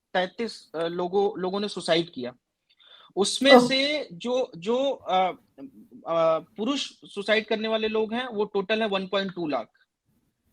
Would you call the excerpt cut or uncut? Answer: uncut